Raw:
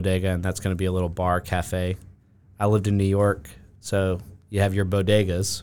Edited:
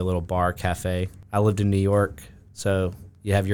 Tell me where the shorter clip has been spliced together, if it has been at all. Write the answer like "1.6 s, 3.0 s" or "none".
1.2 s